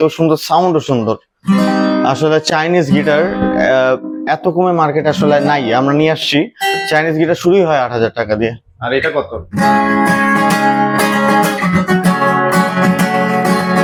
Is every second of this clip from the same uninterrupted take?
yes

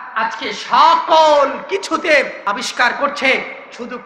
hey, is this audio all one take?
no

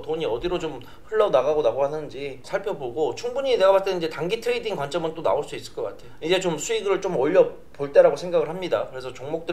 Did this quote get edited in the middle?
yes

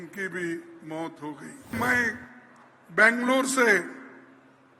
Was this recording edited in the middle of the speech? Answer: yes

